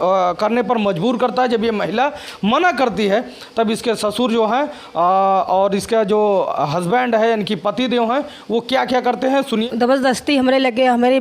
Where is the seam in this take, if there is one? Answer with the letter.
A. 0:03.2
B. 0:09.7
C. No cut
B